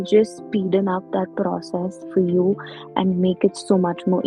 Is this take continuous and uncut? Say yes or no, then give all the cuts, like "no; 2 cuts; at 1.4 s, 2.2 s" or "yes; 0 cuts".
yes; 0 cuts